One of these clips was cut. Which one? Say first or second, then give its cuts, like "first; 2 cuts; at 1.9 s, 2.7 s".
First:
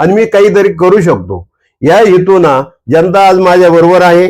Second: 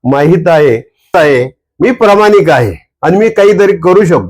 second; 1 cut; at 1.1 s